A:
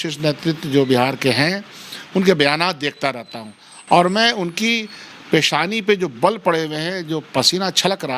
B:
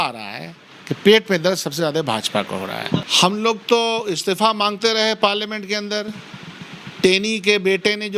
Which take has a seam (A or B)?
B